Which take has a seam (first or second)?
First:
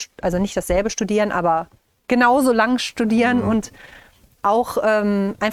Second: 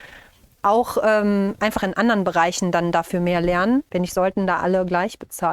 second